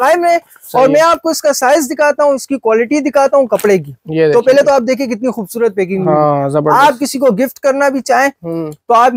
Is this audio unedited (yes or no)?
yes